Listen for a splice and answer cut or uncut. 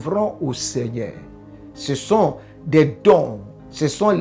uncut